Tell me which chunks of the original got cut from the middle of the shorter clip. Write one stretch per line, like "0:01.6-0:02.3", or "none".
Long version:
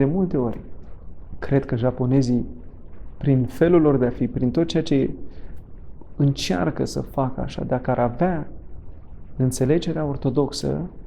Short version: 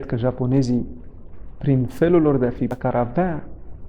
0:04.4-0:07.8